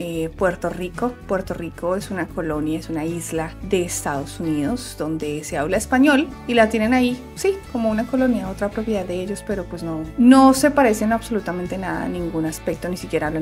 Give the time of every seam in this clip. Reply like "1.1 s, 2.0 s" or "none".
none